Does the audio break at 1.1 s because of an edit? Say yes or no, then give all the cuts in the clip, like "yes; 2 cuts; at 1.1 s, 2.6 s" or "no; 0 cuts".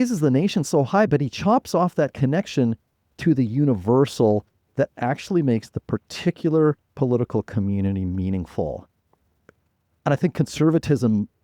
yes; 1 cut; at 1.1 s